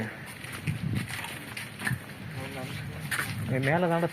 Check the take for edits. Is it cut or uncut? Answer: uncut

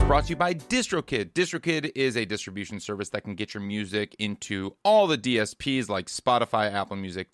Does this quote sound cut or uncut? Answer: uncut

